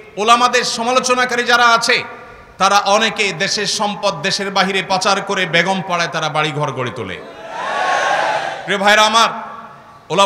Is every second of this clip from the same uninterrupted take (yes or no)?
yes